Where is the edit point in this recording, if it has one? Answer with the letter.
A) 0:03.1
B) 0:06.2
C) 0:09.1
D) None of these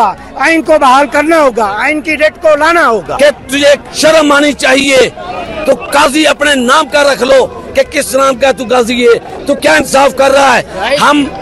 A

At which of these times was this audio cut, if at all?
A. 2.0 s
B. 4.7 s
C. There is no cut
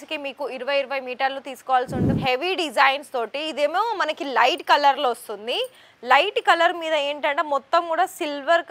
A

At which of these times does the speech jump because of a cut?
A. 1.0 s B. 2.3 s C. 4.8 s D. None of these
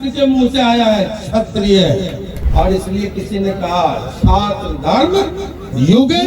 B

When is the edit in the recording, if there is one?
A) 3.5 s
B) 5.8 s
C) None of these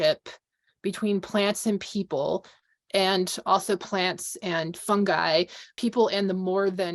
B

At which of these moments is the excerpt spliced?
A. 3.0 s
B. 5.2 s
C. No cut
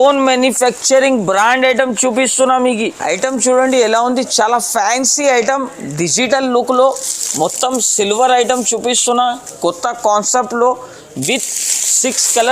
A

